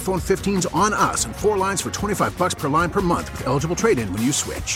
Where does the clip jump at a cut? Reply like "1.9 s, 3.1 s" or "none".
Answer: none